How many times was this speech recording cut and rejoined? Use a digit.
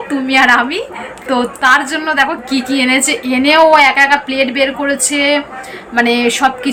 0